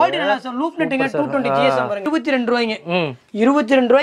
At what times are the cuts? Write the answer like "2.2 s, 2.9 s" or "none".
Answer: 2.0 s

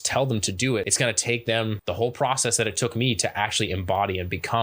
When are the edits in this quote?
0.9 s, 1.8 s

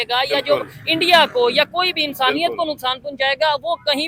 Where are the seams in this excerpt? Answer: none

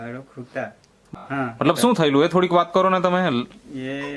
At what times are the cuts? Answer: 1.2 s

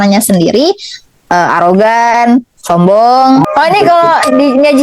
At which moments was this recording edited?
3.5 s

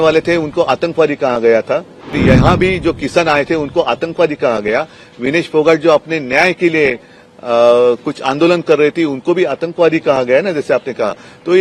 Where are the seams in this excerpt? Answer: 2.2 s

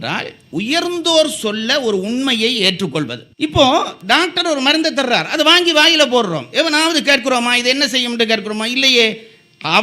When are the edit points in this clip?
3.2 s

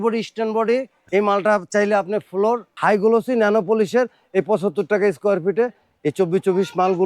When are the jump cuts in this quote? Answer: 1.0 s, 2.7 s

